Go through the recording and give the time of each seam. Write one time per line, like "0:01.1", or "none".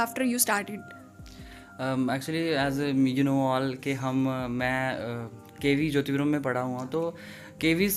none